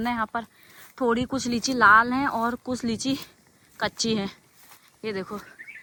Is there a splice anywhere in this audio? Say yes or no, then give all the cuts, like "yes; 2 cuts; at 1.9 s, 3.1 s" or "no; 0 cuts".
no; 0 cuts